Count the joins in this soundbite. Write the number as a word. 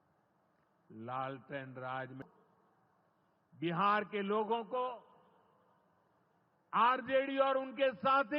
one